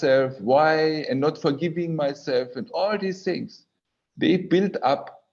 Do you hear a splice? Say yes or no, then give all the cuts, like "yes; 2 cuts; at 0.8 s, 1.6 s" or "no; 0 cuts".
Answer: no; 0 cuts